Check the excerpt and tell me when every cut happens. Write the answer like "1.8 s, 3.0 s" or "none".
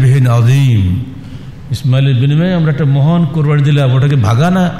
none